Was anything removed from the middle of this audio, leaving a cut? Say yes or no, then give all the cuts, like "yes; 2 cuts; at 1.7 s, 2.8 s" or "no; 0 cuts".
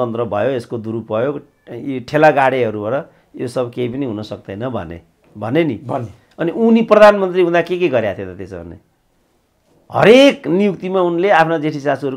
no; 0 cuts